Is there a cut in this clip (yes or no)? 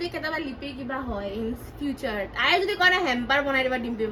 no